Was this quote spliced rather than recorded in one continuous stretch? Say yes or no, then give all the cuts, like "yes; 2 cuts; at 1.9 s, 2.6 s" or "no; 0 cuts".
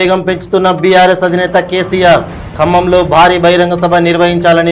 no; 0 cuts